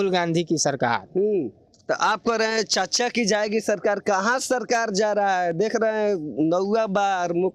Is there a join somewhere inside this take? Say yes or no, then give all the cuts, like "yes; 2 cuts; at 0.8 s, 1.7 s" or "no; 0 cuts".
no; 0 cuts